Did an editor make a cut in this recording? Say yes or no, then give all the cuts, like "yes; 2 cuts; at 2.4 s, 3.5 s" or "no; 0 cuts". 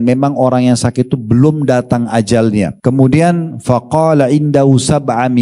yes; 1 cut; at 2.7 s